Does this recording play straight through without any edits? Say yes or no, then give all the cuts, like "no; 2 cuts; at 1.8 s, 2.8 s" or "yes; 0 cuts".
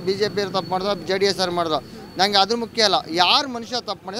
yes; 0 cuts